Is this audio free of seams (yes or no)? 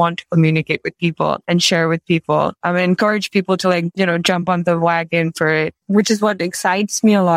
no